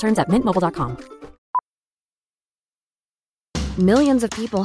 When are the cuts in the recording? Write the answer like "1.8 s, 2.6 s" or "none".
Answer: 1.4 s